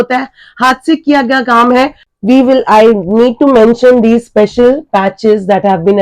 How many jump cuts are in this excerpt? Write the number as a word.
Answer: one